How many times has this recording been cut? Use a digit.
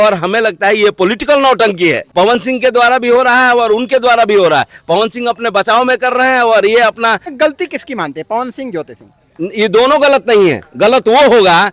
2